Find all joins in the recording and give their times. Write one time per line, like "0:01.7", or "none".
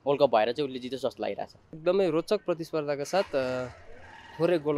0:01.7